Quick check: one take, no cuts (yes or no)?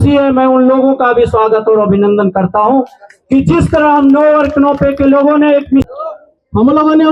no